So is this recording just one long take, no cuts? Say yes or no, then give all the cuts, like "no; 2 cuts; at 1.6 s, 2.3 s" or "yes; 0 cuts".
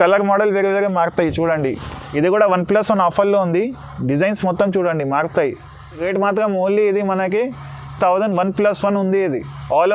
yes; 0 cuts